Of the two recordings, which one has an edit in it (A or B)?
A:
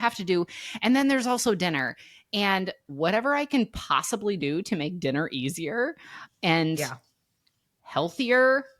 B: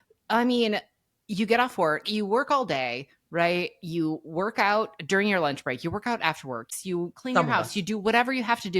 B